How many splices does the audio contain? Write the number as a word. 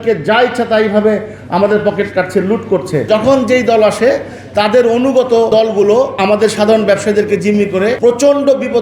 three